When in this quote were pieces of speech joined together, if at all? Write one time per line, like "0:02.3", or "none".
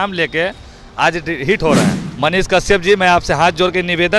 0:02.0